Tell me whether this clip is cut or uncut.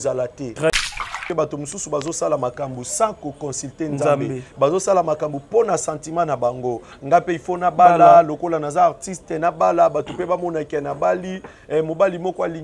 cut